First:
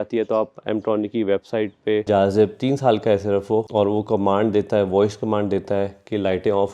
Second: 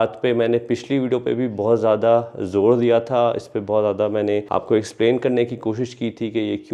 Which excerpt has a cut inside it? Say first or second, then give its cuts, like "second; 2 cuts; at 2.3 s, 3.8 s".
first; 2 cuts; at 2.0 s, 3.7 s